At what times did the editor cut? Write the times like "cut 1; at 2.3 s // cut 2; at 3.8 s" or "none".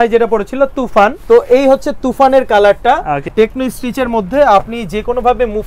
cut 1; at 1.2 s // cut 2; at 3.3 s